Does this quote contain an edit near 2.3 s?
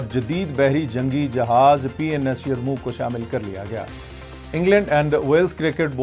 no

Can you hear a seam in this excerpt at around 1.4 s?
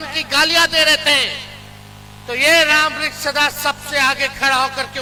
no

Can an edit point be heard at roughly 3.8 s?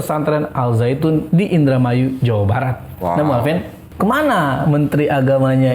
yes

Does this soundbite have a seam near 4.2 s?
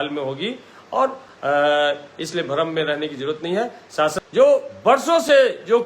yes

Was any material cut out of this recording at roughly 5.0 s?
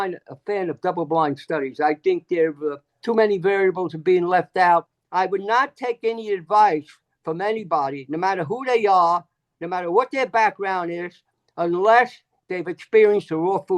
yes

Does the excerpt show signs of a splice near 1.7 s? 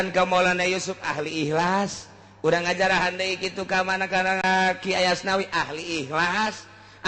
no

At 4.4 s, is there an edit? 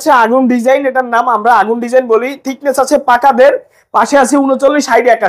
no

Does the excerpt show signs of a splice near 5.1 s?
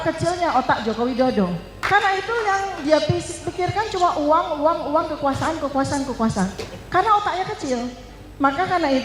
no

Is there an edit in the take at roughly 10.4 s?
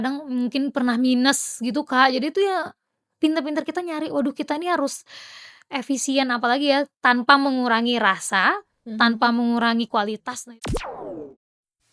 yes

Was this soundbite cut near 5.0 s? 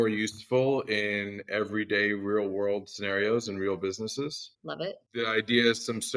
yes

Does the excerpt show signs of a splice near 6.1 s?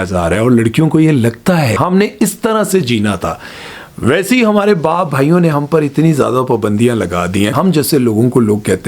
no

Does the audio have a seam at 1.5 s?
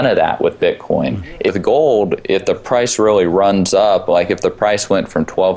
yes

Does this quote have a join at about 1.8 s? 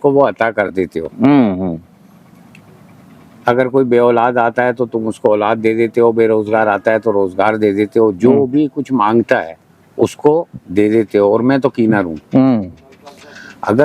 no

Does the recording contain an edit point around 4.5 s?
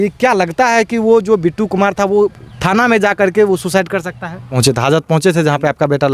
yes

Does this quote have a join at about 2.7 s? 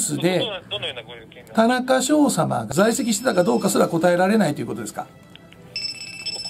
yes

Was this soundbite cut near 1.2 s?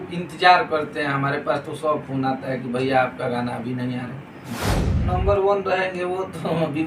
no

